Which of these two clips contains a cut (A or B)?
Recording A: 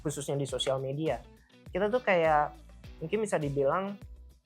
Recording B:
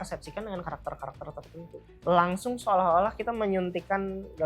B